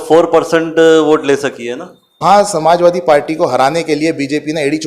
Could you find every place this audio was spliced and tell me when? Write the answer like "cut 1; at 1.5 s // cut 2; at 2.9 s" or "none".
cut 1; at 2.2 s